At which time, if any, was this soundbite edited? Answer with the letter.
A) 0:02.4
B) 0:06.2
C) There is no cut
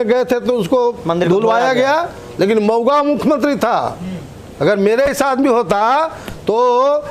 C